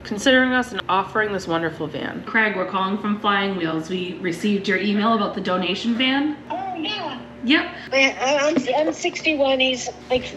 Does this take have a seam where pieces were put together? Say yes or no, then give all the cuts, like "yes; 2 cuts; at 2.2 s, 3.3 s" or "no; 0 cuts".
yes; 2 cuts; at 2.3 s, 7.8 s